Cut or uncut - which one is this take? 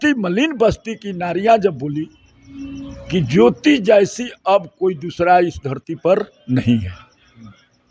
uncut